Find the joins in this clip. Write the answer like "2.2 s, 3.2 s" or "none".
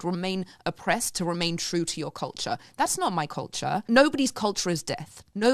3.8 s

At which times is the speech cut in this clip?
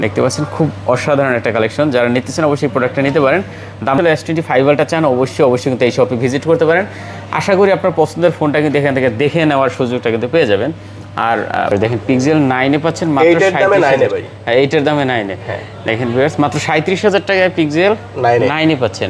4.0 s, 11.7 s

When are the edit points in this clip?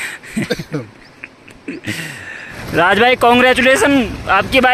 2.6 s

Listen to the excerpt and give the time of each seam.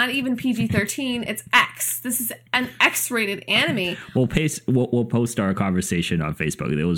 4.0 s

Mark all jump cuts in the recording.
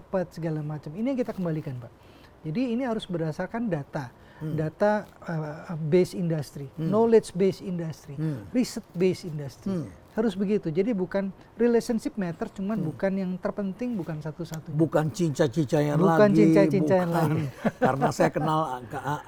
none

